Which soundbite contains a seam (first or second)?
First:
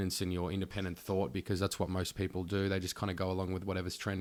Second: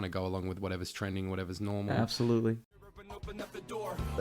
second